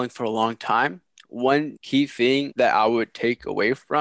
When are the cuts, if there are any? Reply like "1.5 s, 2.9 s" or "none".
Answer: 2.5 s